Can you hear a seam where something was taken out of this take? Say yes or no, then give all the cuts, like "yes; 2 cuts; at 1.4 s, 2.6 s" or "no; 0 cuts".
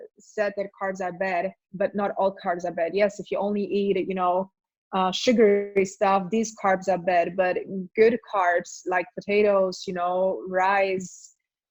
no; 0 cuts